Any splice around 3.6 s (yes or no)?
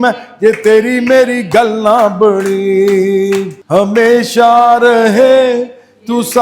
yes